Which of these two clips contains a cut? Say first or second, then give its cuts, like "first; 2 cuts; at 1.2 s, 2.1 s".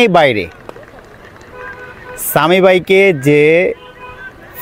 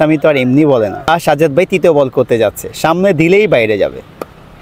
second; 1 cut; at 1.1 s